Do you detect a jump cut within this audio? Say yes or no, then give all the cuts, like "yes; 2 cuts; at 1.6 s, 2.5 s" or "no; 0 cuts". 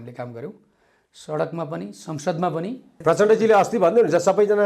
yes; 1 cut; at 2.9 s